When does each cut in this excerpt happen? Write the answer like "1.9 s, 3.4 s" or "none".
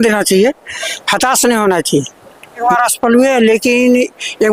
2.6 s